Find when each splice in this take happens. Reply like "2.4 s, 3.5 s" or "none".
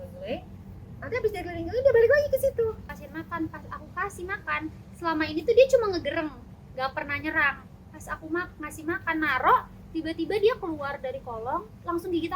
3.0 s